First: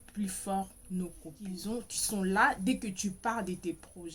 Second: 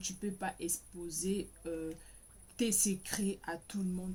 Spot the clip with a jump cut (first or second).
first